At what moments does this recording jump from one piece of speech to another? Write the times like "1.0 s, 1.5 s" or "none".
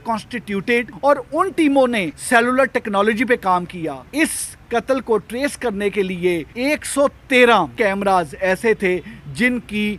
0.9 s, 2.1 s, 4.0 s, 6.5 s, 7.7 s